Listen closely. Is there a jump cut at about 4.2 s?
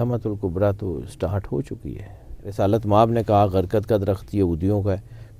no; 1 cut; at 2.4 s

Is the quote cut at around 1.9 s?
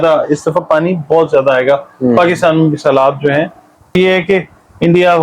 no; 1 cut; at 3.9 s

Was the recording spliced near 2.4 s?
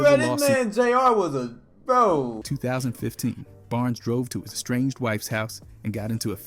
yes; 1 cut; at 2.4 s

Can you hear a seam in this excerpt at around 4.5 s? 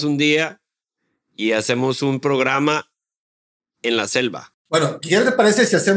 yes; 1 cut; at 4.5 s

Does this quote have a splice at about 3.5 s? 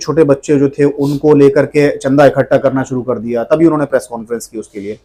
no; 0 cuts

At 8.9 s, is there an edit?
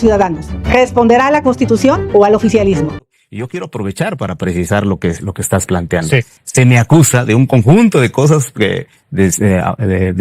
no; 1 cut; at 3.1 s

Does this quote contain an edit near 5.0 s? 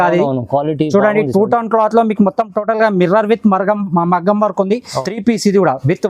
yes; 1 cut; at 5.0 s

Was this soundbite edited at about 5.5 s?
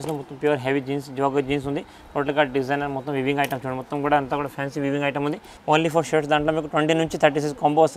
yes; 1 cut; at 5.5 s

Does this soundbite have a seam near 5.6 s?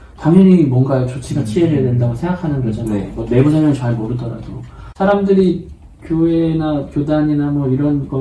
no; 0 cuts

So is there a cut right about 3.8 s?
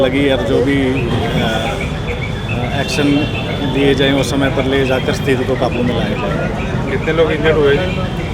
no; 0 cuts

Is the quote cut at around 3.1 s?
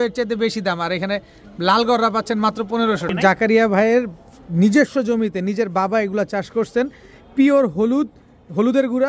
yes; 1 cut; at 3.1 s

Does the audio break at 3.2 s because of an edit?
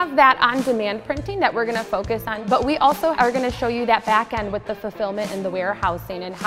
yes; 2 cuts; at 2.3 s, 3.2 s

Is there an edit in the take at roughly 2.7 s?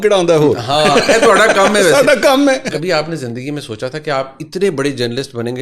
yes; 1 cut; at 2.7 s

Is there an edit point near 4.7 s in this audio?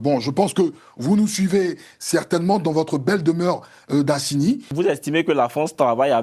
yes; 1 cut; at 4.7 s

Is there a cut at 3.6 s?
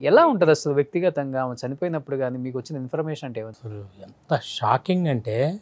yes; 1 cut; at 3.6 s

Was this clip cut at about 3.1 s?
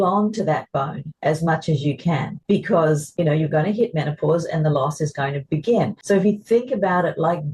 yes; 3 cuts; at 2.3 s, 3.1 s, 6.0 s

